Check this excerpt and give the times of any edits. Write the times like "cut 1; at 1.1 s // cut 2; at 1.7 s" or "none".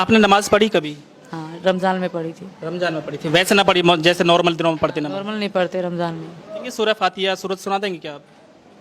cut 1; at 6.7 s